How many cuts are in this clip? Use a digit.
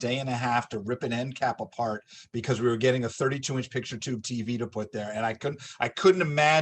0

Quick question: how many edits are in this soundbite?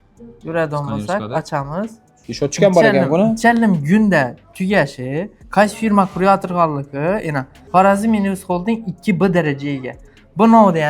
2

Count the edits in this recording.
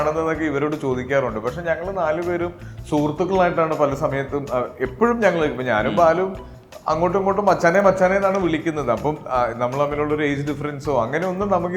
0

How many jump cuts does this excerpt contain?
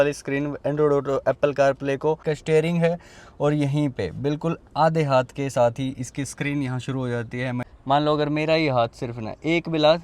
2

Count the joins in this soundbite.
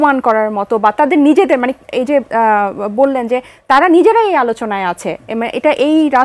0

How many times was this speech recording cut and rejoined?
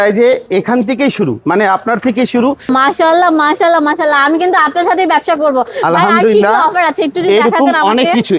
1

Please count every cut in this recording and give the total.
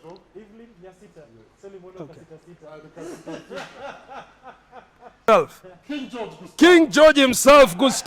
1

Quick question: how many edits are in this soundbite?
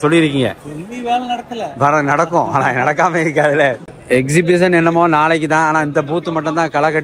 1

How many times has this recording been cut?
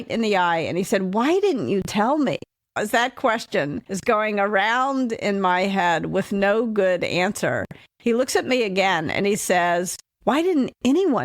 3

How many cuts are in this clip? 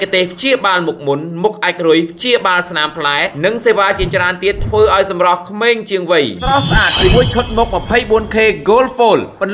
0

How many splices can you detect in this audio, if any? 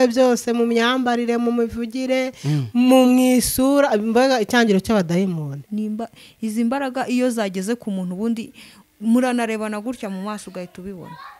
1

